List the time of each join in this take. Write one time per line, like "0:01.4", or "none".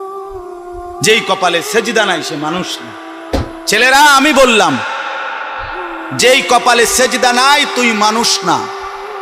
0:01.0

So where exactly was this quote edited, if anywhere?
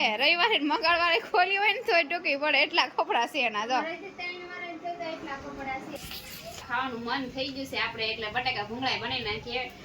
0:06.0

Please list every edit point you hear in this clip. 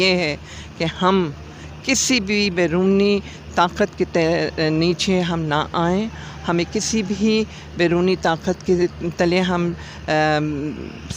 none

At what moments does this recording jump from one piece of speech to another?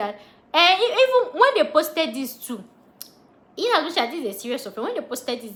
none

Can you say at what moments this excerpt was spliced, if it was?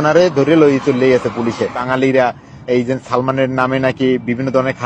0:01.8

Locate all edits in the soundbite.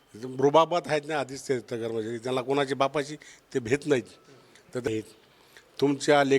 0:04.9

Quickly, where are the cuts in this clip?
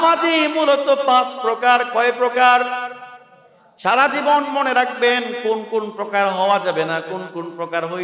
none

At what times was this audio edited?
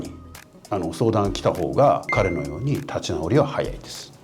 0:02.1

